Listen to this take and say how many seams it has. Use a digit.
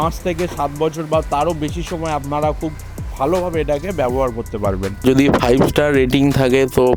1